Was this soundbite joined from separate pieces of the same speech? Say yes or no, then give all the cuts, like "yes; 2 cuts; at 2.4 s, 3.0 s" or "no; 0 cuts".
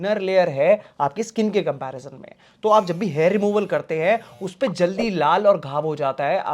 no; 0 cuts